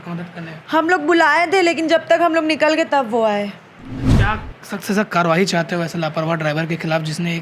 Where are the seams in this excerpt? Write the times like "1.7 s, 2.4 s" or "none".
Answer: 4.0 s